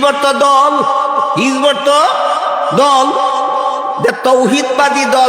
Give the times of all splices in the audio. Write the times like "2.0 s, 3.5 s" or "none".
none